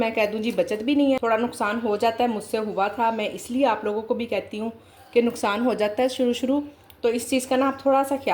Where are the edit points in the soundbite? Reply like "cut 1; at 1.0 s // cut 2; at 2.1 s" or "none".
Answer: cut 1; at 1.2 s